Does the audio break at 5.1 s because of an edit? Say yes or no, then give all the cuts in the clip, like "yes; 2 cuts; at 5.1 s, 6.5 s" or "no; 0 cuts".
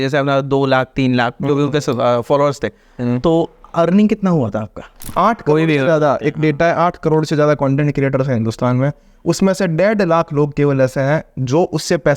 yes; 1 cut; at 5.1 s